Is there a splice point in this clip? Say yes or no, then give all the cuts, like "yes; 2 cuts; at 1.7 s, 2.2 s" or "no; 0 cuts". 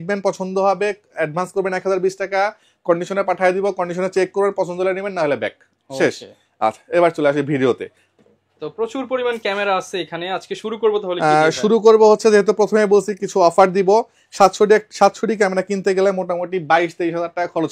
no; 0 cuts